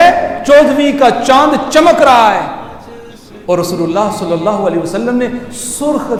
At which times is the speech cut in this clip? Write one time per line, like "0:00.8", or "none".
none